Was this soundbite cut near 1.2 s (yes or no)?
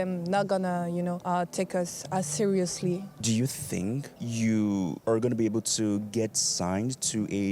yes